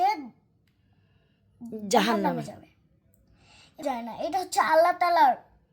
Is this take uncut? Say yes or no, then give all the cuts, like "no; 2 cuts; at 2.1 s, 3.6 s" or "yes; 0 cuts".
no; 1 cut; at 3.9 s